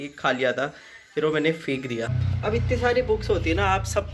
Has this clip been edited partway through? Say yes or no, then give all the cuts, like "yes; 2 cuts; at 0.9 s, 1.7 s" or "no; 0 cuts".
yes; 1 cut; at 2.2 s